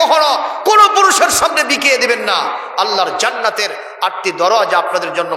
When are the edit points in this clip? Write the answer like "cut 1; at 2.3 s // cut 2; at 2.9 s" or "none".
none